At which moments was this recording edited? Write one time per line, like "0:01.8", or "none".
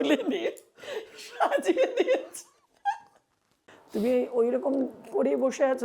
0:03.6

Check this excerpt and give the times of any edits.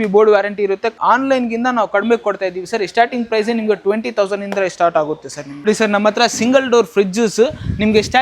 0:00.9
0:05.7

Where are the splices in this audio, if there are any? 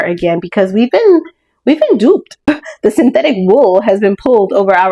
0:02.5

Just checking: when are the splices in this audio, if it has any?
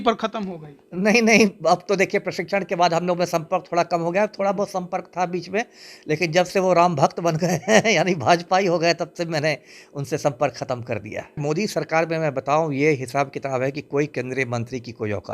0:11.4

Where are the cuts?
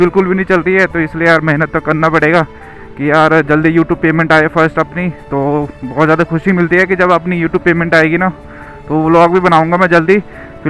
none

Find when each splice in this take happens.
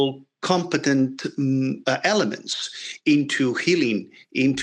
none

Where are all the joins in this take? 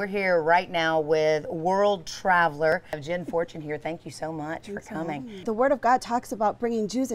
0:03.0
0:05.4

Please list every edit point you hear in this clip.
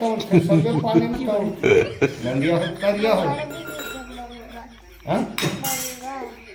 none

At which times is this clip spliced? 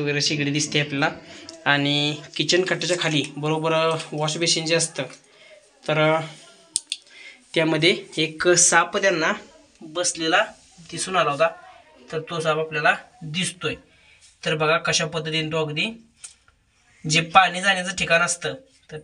none

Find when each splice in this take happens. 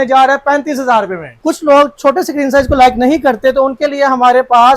0:01.3

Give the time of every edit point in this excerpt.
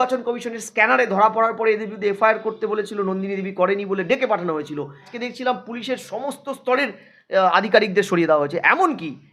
0:05.2

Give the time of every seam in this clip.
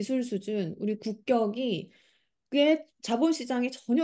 none

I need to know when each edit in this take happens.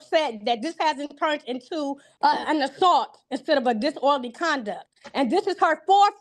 0:02.1

